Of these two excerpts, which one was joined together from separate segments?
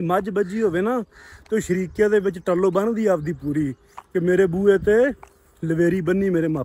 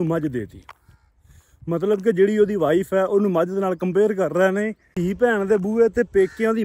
second; 1 cut; at 4.8 s

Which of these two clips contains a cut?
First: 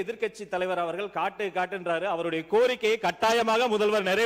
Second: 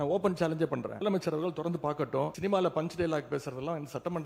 second; 2 cuts; at 1.0 s, 2.3 s

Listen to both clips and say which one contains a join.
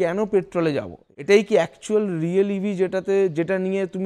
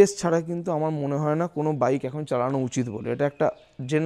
first; 1 cut; at 1.0 s

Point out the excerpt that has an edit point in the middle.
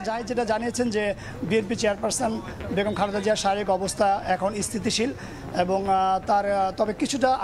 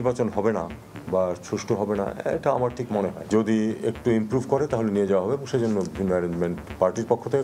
second; 1 cut; at 3.3 s

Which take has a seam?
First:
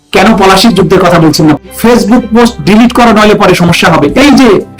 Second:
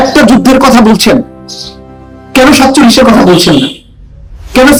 first; 1 cut; at 1.6 s

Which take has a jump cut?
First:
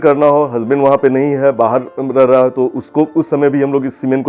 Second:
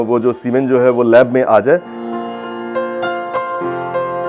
second; 1 cut; at 2.0 s

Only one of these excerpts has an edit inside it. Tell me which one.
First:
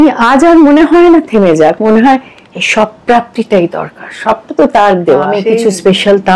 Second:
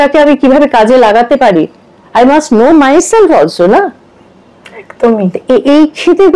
first; 1 cut; at 5.4 s

